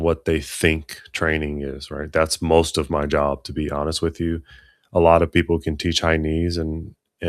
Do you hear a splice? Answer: no; 0 cuts

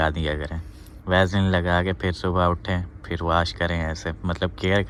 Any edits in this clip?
no; 0 cuts

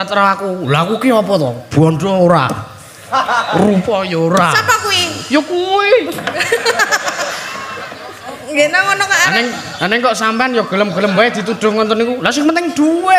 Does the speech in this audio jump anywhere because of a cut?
no; 0 cuts

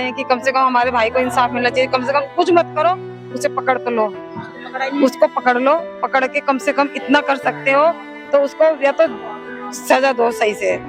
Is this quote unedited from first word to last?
yes; 0 cuts

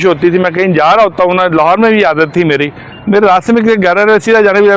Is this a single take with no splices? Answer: yes; 0 cuts

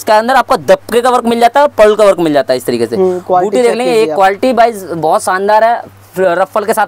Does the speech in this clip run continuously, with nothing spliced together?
yes; 0 cuts

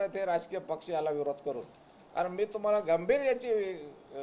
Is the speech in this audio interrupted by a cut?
no; 0 cuts

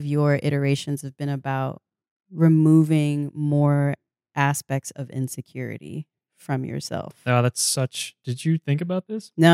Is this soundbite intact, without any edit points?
yes; 0 cuts

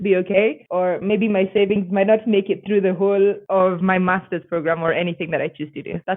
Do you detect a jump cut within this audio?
no; 0 cuts

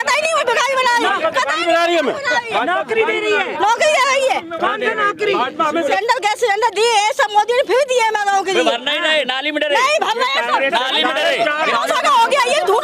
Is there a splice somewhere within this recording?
yes; 2 cuts; at 5.9 s, 11.7 s

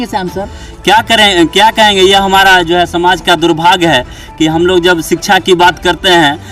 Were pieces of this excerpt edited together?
no; 0 cuts

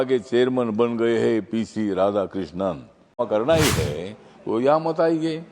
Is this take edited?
yes; 1 cut; at 3.2 s

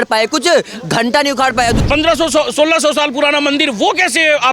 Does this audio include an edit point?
yes; 1 cut; at 1.8 s

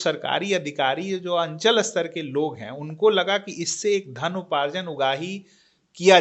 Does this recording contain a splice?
no; 0 cuts

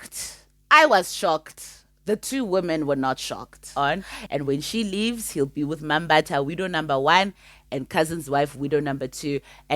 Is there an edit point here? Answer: yes; 1 cut; at 3.7 s

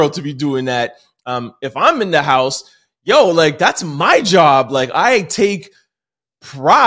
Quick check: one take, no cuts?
yes; 0 cuts

